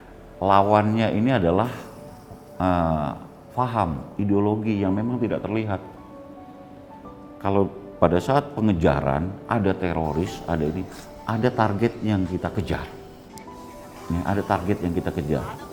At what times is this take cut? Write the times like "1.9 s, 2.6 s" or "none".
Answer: none

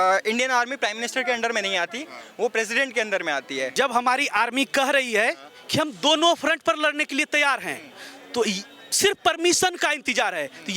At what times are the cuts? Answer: 3.7 s

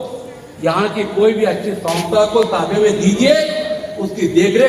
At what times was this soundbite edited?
none

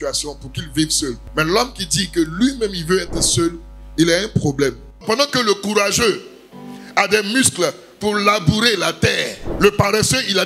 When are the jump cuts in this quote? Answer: 4.9 s

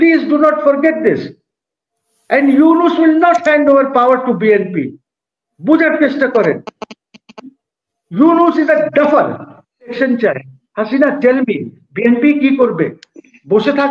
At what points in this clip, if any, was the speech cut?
9.9 s

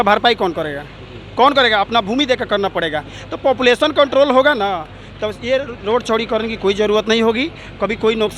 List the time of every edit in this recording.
none

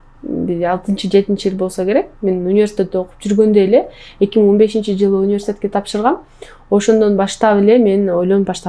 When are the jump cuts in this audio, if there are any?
none

